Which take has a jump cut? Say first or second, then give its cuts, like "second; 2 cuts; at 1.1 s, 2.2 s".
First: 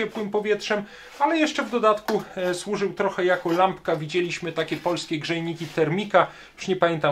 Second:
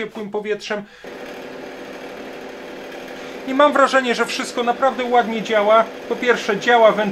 second; 1 cut; at 1.0 s